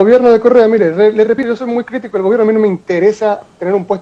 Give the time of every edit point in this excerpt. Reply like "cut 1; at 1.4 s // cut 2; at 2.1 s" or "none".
cut 1; at 1.4 s